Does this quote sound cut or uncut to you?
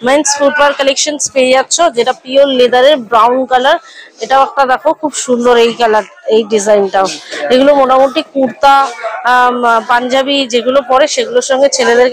uncut